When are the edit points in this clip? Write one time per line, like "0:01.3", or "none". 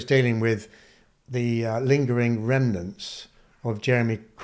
none